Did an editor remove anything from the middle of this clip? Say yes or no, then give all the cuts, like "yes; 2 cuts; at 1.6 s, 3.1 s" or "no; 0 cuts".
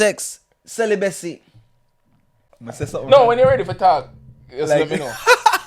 yes; 1 cut; at 1.9 s